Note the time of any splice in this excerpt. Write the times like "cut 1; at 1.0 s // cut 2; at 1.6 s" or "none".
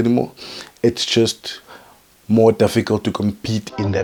none